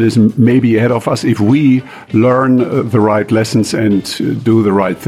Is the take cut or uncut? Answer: uncut